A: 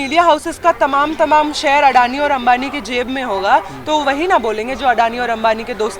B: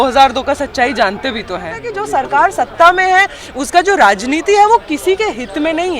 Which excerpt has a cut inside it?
B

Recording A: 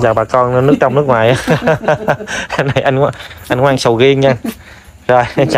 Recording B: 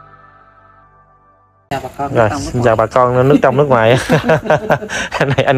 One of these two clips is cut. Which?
B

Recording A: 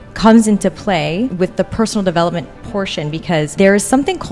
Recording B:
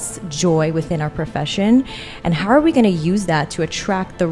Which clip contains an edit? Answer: A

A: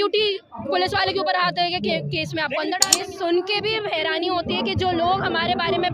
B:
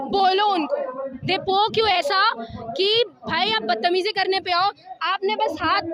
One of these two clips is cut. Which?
A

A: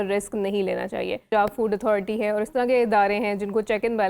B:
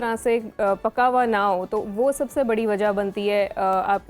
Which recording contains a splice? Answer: A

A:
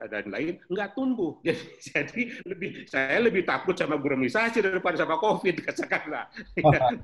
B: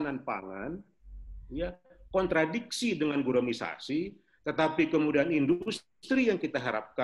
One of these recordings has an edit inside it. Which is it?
A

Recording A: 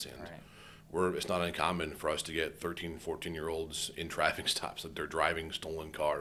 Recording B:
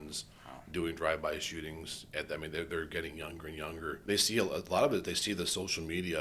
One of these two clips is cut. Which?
B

